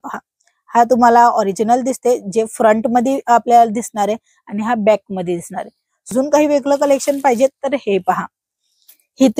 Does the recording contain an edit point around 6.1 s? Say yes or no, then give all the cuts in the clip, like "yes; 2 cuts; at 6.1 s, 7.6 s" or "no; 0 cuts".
yes; 1 cut; at 6.1 s